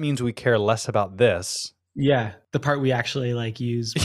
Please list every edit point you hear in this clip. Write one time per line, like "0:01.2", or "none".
0:02.4